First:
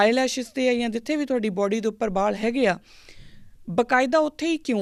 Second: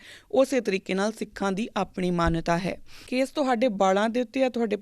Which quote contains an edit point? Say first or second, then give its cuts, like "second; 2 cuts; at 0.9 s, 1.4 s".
second; 1 cut; at 3.0 s